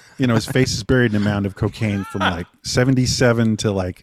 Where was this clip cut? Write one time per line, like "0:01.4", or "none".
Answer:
none

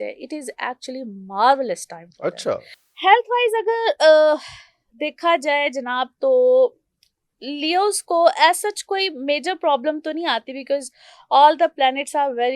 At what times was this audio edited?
0:02.8

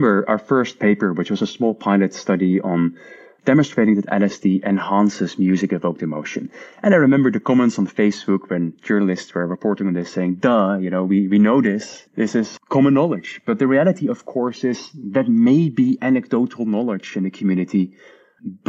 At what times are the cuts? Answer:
0:11.9

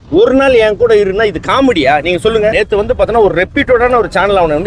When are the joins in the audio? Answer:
0:02.5

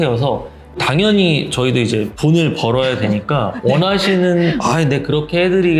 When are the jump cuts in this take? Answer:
0:00.8
0:02.1

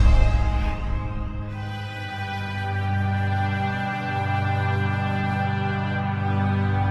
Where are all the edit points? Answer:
none

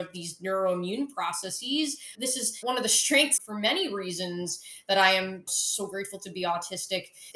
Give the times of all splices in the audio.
0:02.1

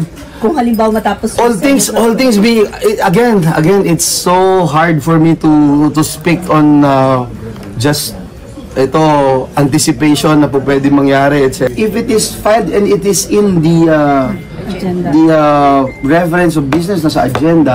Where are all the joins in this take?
0:11.7

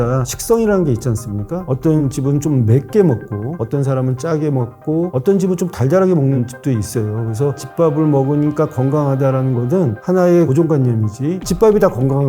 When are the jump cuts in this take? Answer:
0:01.7
0:07.6

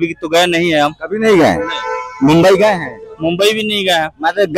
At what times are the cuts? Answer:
none

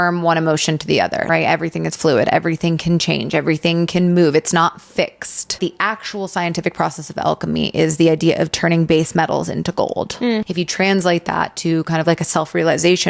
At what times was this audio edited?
0:01.3
0:05.6
0:10.5

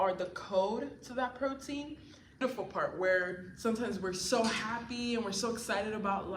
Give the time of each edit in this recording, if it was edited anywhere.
0:02.4

